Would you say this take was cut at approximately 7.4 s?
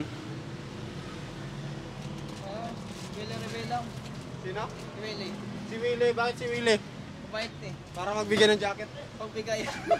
no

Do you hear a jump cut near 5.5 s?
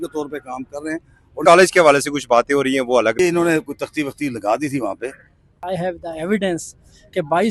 yes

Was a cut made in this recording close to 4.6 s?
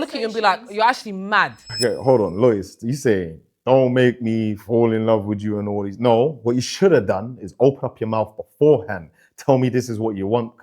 no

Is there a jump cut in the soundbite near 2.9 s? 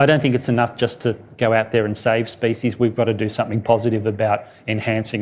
no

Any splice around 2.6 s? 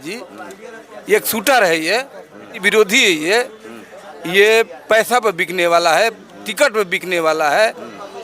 yes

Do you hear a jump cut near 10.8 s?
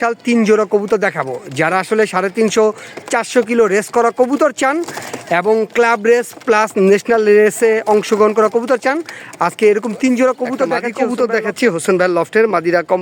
yes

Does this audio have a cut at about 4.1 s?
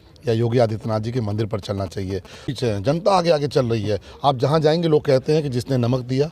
no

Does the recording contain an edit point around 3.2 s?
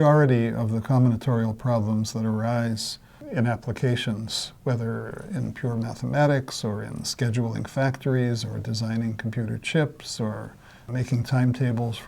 yes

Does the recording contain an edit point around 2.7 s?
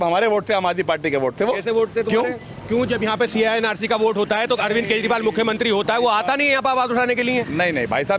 no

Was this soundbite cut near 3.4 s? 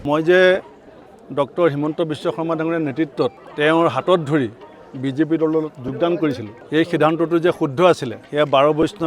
yes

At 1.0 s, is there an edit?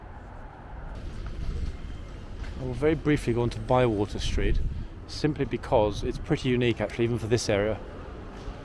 yes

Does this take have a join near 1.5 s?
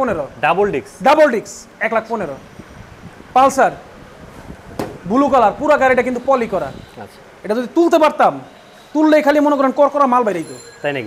no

